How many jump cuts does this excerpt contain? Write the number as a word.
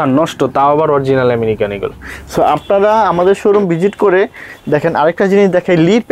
zero